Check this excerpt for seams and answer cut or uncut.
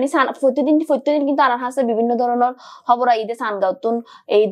uncut